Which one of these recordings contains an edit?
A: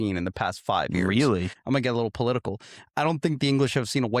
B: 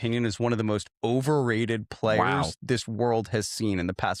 A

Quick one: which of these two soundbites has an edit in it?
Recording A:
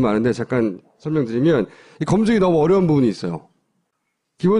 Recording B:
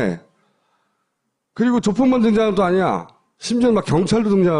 A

